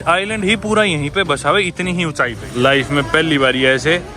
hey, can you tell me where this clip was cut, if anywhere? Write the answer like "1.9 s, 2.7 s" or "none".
2.4 s